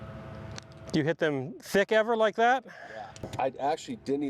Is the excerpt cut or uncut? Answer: cut